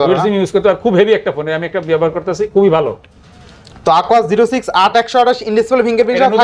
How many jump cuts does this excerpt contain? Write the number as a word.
zero